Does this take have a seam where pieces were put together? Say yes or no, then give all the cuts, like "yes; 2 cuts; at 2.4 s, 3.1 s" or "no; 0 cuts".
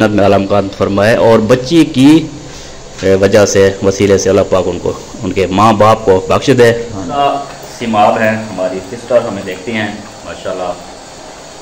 yes; 1 cut; at 7.2 s